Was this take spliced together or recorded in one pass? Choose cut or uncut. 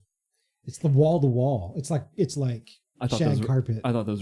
uncut